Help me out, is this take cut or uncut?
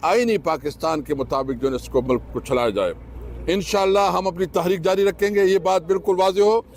uncut